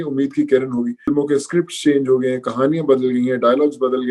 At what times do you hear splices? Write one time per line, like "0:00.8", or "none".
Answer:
0:01.1